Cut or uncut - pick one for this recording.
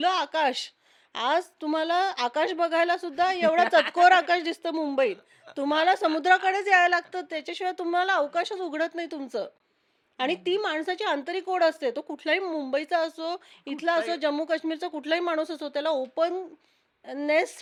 uncut